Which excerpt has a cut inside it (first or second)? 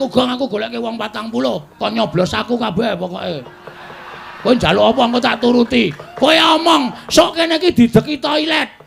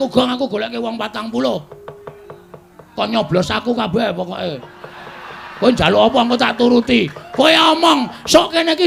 first